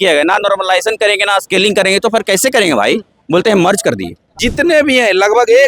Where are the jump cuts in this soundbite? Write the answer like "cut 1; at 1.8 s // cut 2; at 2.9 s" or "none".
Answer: cut 1; at 4.4 s